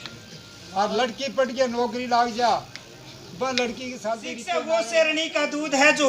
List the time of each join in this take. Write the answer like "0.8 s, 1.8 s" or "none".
4.3 s